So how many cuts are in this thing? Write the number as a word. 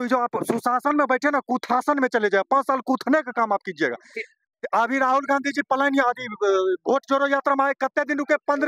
zero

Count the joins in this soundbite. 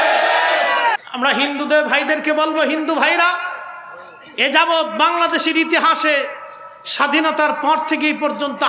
one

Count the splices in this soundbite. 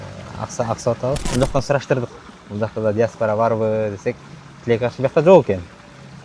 one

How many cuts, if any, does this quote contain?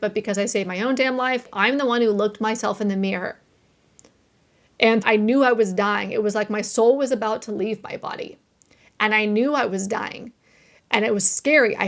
two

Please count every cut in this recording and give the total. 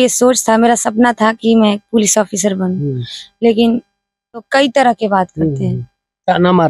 one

